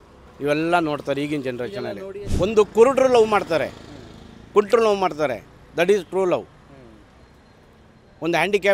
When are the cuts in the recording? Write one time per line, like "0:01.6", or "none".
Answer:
0:02.2